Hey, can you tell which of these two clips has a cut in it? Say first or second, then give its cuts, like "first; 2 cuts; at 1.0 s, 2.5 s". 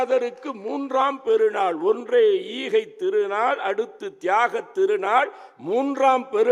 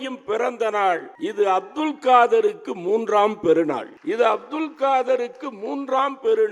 second; 2 cuts; at 1.1 s, 3.9 s